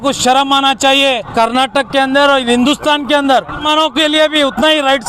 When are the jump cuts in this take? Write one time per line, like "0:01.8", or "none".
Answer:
0:01.3
0:03.6